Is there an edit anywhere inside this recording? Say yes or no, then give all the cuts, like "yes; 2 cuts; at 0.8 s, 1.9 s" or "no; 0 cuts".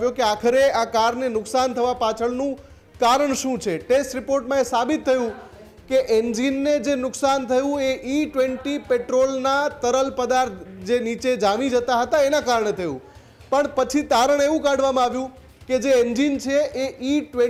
no; 0 cuts